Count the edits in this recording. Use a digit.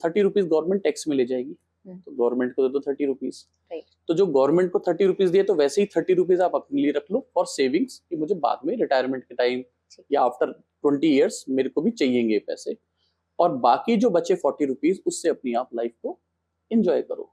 0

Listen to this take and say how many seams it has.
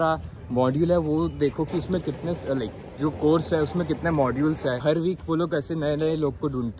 1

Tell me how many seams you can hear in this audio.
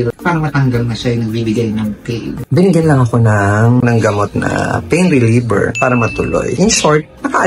2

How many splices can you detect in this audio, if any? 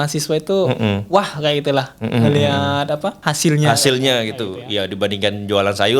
1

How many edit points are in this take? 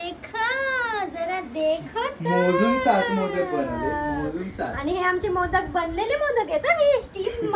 0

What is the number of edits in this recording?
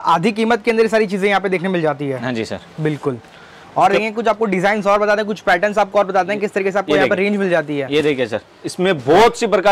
0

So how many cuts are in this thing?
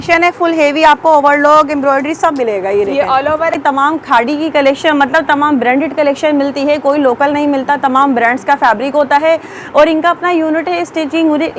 1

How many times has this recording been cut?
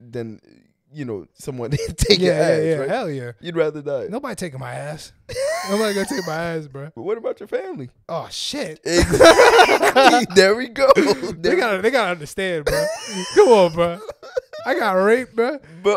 2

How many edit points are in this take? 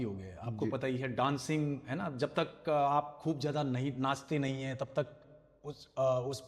0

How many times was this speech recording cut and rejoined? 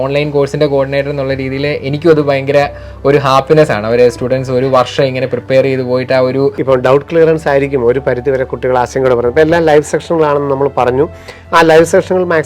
1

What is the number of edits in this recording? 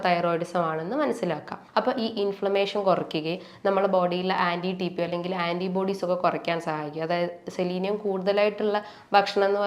1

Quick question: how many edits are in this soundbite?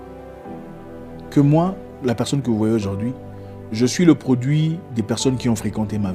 1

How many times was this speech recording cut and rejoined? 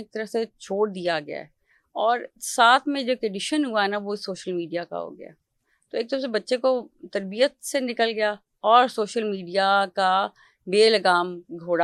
0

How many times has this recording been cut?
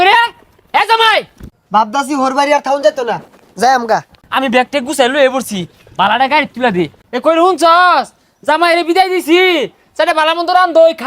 3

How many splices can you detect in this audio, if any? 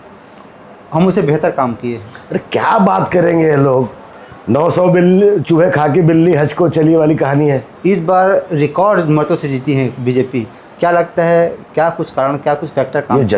1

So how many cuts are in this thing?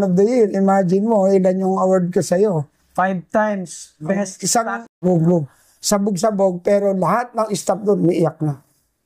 1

